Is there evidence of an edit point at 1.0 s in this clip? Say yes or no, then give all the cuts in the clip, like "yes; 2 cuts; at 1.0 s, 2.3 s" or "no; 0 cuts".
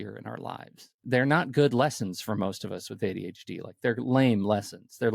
yes; 1 cut; at 1.0 s